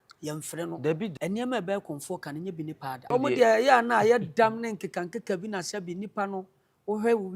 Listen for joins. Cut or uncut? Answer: cut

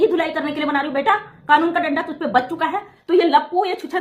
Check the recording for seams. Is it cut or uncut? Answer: cut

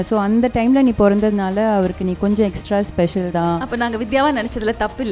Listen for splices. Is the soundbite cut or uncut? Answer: uncut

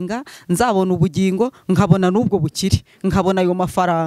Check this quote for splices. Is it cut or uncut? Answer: uncut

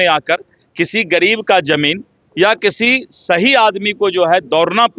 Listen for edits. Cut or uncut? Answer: uncut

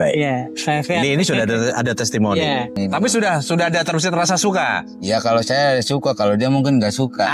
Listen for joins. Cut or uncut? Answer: cut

